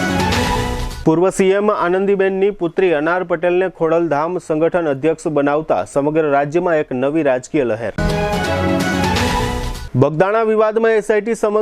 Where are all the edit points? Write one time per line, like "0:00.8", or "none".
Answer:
0:00.9

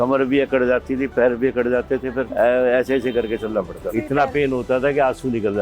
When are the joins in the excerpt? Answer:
0:02.3
0:03.9

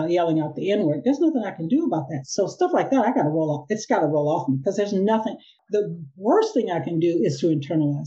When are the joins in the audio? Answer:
0:05.5

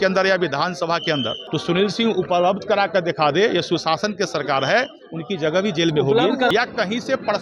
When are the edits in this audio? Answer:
0:01.4
0:06.5

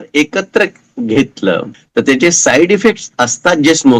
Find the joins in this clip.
0:01.8

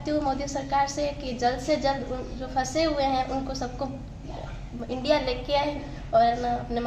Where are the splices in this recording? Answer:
none

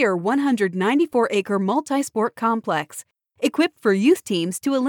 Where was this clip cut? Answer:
none

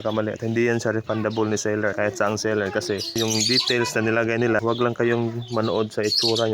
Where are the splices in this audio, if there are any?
0:01.9
0:03.2
0:04.6

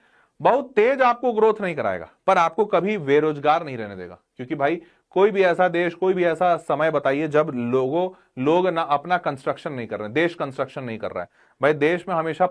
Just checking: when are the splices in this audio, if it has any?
none

